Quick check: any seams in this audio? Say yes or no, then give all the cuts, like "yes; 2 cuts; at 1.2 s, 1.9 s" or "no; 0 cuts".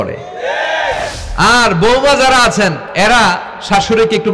yes; 2 cuts; at 1.1 s, 2.9 s